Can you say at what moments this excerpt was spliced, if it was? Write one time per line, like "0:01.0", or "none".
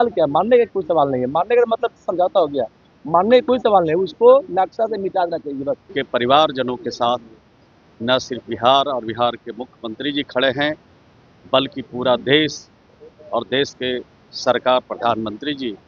0:05.9